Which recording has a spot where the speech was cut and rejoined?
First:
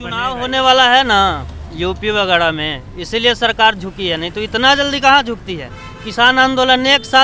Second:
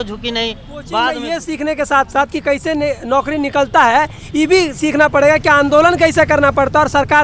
second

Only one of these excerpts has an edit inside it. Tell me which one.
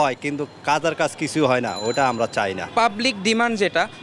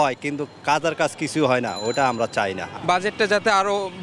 first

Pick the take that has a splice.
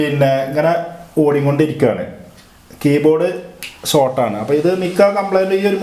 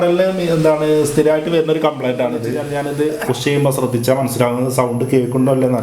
second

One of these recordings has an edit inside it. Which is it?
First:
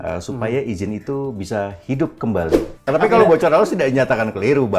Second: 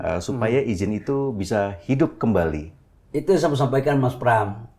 first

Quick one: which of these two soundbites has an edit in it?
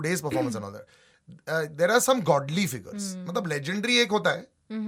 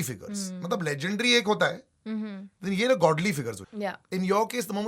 second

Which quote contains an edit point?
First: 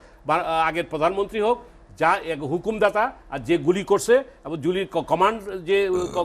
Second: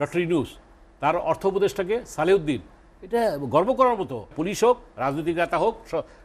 second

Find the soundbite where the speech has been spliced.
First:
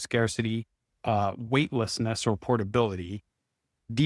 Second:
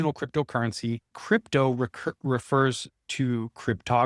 second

